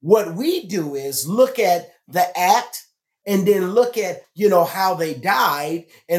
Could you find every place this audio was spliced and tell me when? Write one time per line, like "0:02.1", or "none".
0:04.2